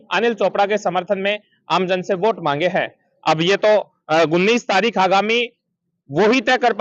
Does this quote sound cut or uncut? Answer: uncut